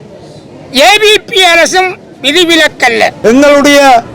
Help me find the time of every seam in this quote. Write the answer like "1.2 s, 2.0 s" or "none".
3.2 s